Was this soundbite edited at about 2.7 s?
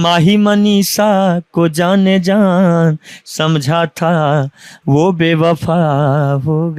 no; 0 cuts

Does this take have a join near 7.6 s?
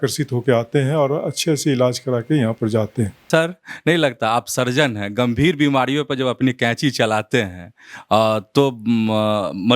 no; 1 cut; at 3.2 s

